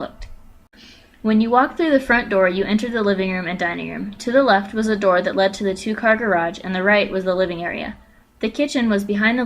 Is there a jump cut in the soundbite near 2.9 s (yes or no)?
yes